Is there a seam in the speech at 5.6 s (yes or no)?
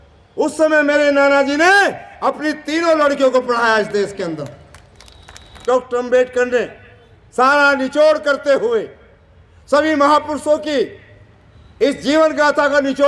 yes